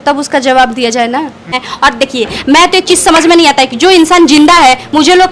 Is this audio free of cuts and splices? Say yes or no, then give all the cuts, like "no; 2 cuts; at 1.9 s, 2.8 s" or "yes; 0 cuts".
no; 1 cut; at 1.6 s